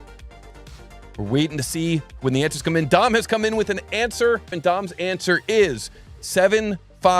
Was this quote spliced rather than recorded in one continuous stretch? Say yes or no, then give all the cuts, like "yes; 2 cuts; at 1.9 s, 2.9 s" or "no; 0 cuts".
yes; 1 cut; at 4.6 s